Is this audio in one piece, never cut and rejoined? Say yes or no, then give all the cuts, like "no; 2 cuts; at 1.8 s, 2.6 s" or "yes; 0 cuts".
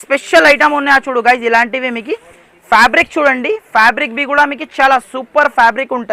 yes; 0 cuts